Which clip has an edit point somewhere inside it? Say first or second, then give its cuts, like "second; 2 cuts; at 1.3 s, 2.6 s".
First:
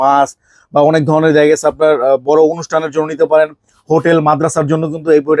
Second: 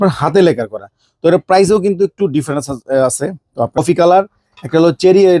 second; 1 cut; at 3.8 s